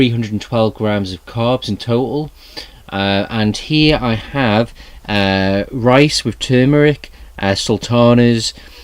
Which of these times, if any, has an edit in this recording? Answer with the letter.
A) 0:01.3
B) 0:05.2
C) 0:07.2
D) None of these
A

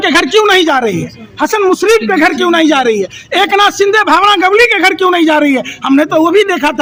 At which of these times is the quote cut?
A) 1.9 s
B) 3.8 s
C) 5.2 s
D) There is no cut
D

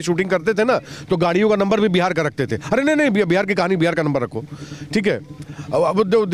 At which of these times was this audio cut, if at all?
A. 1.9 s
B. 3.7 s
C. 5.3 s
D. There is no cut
D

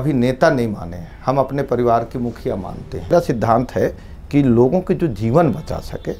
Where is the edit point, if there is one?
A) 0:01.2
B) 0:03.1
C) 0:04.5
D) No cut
B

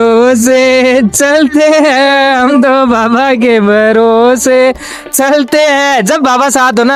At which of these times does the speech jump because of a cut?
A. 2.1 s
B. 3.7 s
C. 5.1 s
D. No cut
D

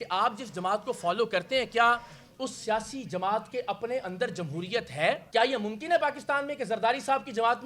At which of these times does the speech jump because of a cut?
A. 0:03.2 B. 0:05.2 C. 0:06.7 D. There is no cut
B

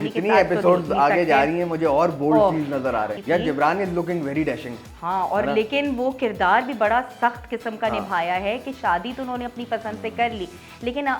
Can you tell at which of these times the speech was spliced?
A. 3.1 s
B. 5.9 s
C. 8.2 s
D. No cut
A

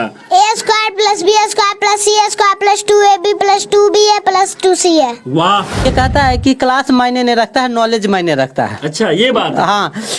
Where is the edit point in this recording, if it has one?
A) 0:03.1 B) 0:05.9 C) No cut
B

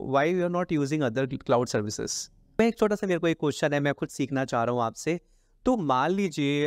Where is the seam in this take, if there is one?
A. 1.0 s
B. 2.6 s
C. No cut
B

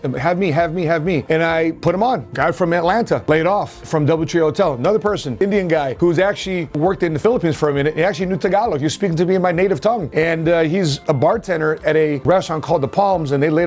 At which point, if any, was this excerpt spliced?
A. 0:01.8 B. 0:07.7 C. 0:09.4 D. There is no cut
D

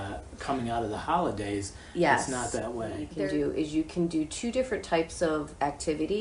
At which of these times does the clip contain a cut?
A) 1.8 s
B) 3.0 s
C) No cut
B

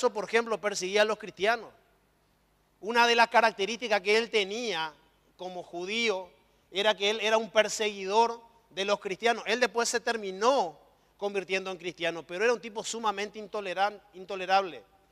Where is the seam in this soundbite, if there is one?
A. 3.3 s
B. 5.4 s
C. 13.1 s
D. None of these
D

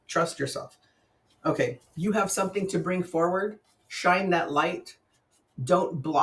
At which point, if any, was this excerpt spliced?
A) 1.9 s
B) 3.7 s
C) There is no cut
A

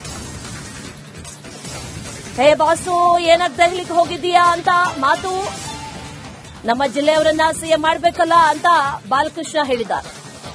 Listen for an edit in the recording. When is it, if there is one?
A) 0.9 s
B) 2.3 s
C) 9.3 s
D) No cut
B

